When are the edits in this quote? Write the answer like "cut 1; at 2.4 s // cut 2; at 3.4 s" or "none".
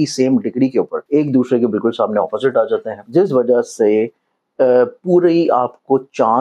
cut 1; at 1.0 s // cut 2; at 3.0 s